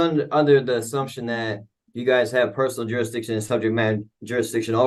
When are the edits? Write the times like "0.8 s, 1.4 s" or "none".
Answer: none